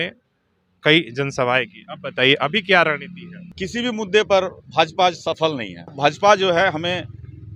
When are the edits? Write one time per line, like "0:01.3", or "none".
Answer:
0:03.6
0:05.9